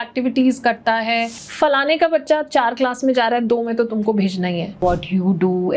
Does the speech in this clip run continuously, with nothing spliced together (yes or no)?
no